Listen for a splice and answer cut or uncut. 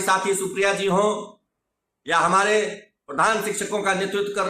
uncut